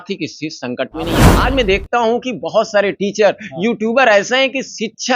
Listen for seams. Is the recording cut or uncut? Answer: cut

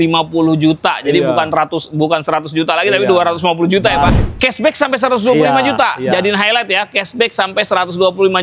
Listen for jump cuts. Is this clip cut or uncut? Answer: cut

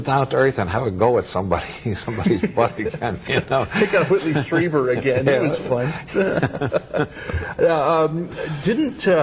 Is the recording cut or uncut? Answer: uncut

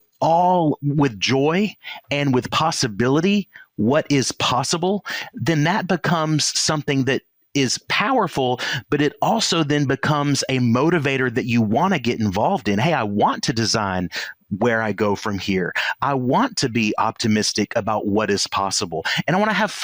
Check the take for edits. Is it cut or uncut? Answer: uncut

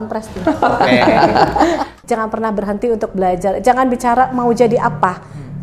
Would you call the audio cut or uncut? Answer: cut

